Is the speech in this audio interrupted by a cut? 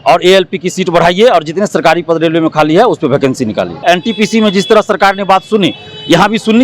yes; 1 cut; at 3.8 s

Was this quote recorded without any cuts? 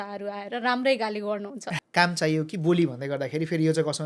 no; 1 cut; at 1.7 s

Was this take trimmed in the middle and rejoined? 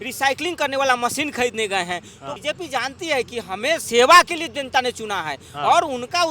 yes; 1 cut; at 2.3 s

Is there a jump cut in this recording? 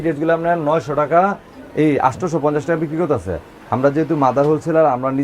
no; 0 cuts

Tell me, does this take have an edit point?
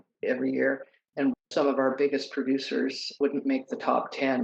no; 0 cuts

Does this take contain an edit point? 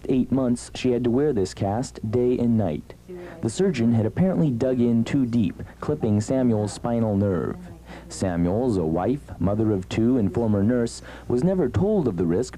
no; 0 cuts

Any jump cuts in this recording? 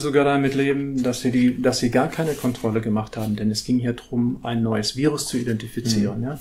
no; 0 cuts

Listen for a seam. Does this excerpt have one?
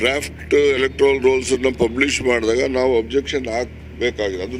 no; 0 cuts

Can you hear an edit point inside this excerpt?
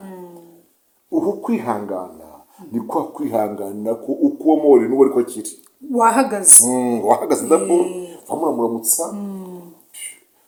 no; 0 cuts

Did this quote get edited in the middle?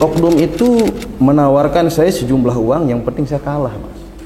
no; 0 cuts

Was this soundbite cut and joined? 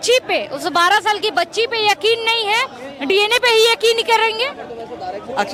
no; 0 cuts

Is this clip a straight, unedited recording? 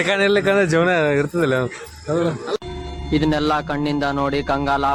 yes; 0 cuts

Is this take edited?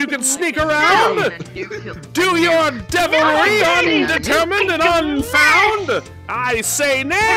no; 0 cuts

